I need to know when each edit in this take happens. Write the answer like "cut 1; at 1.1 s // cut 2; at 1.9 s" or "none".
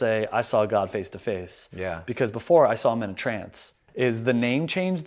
cut 1; at 3.8 s